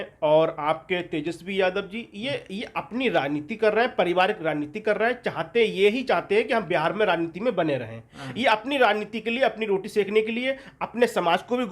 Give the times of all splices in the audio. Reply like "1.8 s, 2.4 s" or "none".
none